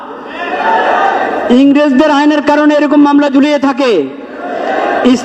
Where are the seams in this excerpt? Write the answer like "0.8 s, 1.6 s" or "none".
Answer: none